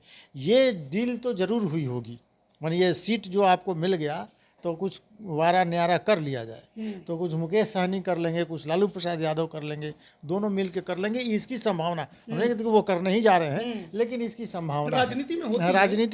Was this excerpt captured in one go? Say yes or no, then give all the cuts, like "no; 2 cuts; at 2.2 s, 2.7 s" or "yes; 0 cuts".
yes; 0 cuts